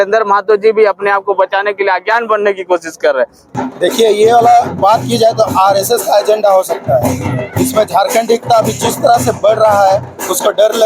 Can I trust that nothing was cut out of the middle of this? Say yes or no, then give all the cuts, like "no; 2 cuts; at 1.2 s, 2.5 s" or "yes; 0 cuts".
no; 1 cut; at 3.4 s